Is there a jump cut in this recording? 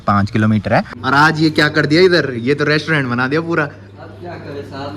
yes; 1 cut; at 0.9 s

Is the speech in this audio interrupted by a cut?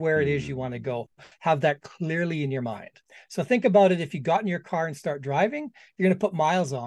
no; 0 cuts

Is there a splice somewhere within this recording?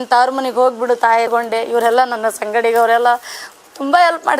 yes; 1 cut; at 1.3 s

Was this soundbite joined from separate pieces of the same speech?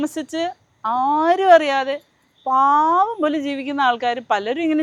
no; 0 cuts

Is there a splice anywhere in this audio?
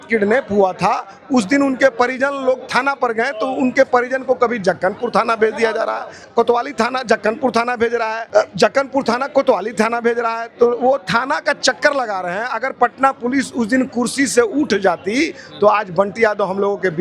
yes; 2 cuts; at 6.1 s, 8.2 s

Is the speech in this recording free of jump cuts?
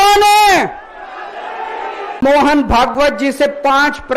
no; 1 cut; at 2.2 s

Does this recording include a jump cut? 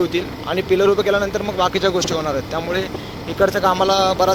no; 0 cuts

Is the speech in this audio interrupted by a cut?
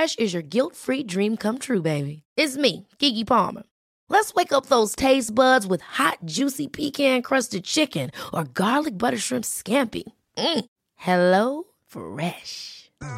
no; 0 cuts

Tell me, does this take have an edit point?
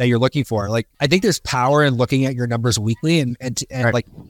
yes; 1 cut; at 0.9 s

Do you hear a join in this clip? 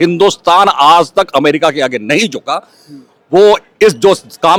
no; 0 cuts

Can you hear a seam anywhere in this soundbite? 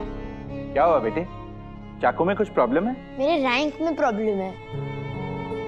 yes; 1 cut; at 3.1 s

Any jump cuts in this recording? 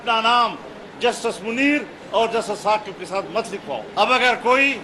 yes; 1 cut; at 3.9 s

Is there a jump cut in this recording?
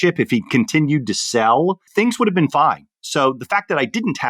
no; 0 cuts

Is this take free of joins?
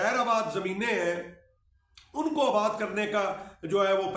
yes; 0 cuts

